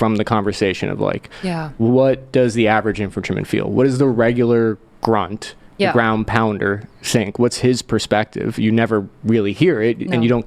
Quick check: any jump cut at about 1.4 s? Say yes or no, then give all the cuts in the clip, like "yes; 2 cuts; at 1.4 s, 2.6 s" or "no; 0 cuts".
no; 0 cuts